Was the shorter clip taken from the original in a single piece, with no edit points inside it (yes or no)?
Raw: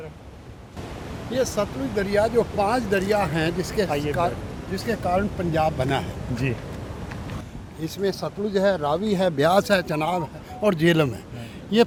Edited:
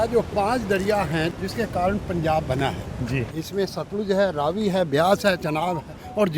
no